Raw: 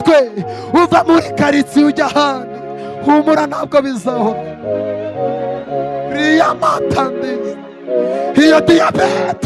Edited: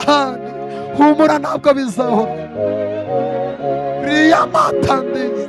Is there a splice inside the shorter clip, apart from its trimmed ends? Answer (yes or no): no